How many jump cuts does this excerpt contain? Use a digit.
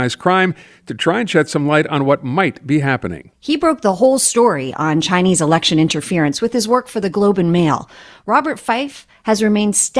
1